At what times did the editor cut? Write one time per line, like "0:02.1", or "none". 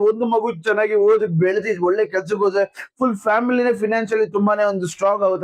none